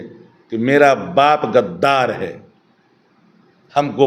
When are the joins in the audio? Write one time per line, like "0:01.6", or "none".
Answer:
none